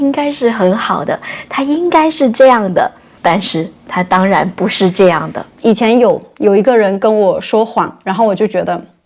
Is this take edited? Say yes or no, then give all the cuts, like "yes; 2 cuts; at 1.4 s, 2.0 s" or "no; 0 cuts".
yes; 1 cut; at 5.6 s